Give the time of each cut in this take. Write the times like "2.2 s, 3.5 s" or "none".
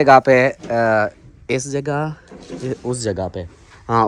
none